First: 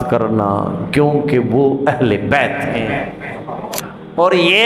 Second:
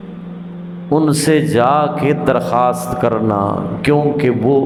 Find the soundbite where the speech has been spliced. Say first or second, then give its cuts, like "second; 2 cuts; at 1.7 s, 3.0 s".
first; 1 cut; at 3.7 s